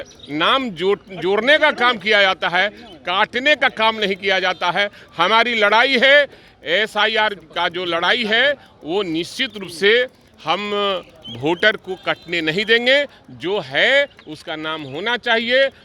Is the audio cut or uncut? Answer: uncut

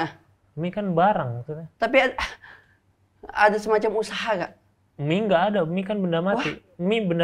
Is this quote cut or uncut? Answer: uncut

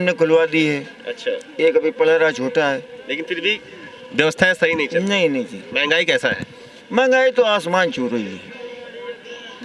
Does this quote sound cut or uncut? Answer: uncut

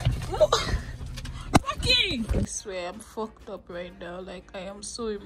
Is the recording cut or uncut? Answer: cut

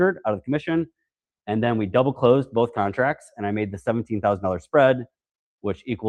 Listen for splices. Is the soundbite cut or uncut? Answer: uncut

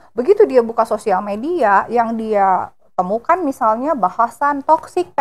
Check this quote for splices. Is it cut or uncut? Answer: uncut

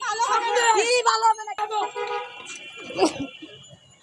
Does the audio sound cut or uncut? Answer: cut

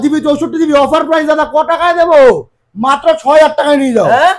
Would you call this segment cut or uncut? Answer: uncut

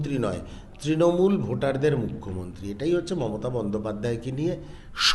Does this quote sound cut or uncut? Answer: uncut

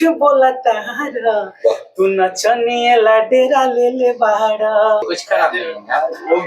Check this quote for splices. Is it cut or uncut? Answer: cut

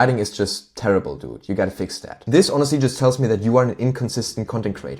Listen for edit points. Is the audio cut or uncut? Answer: cut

